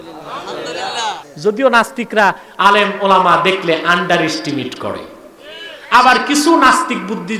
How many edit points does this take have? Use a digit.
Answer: 1